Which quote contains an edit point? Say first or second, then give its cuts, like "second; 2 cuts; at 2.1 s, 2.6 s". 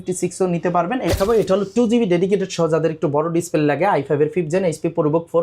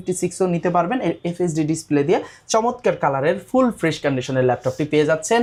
first; 1 cut; at 1.2 s